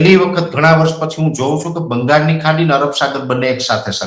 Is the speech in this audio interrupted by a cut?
no; 0 cuts

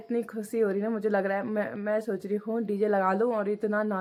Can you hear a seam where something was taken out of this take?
no; 0 cuts

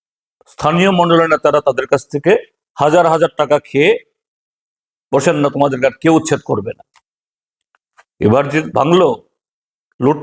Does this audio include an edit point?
no; 0 cuts

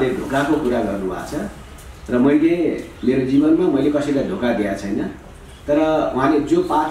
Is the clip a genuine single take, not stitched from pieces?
yes; 0 cuts

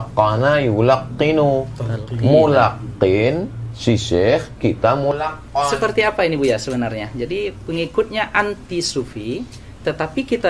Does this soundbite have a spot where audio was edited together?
yes; 1 cut; at 5.1 s

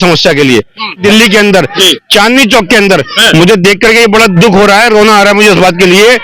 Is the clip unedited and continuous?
no; 1 cut; at 1.0 s

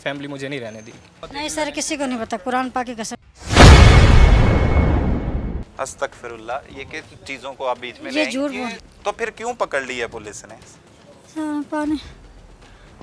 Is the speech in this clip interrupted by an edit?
yes; 2 cuts; at 1.2 s, 8.9 s

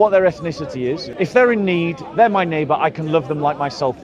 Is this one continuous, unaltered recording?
no; 1 cut; at 1.0 s

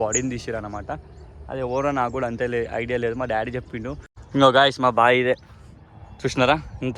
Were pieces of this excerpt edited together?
yes; 1 cut; at 4.1 s

